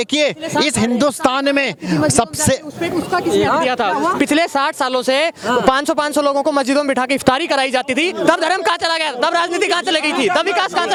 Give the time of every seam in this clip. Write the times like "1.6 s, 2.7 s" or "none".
none